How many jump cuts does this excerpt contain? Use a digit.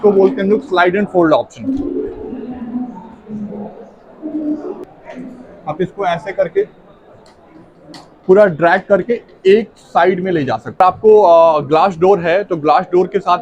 2